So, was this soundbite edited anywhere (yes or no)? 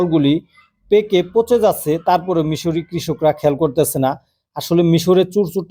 no